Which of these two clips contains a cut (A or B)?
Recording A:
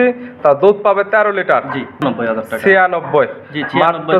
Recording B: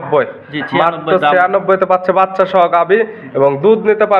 A